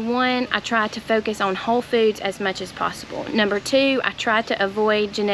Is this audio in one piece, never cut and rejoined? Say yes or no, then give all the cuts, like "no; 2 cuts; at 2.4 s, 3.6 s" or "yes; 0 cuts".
yes; 0 cuts